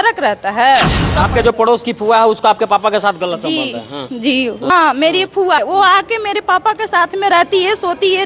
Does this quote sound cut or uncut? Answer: cut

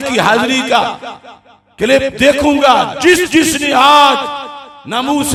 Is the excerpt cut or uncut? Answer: uncut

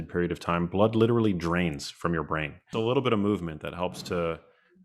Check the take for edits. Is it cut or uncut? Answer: cut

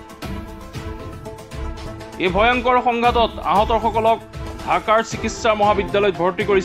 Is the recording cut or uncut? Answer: uncut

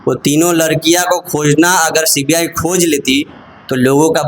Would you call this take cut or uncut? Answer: uncut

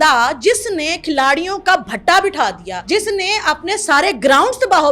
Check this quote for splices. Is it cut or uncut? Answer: cut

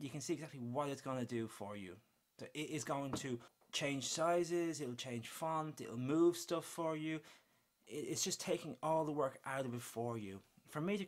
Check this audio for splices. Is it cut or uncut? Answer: cut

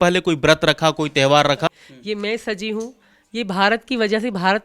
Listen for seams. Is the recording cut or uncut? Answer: cut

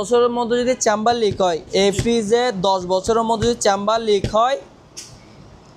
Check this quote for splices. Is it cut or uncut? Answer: uncut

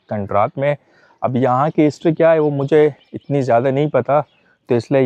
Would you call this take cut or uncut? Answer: uncut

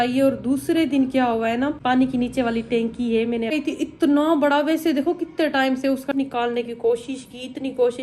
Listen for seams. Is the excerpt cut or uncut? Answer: cut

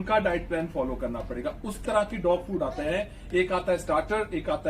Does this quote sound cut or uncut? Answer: cut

